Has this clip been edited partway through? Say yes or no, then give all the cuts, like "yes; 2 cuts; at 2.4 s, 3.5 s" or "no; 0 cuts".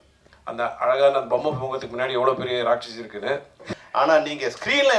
yes; 1 cut; at 3.6 s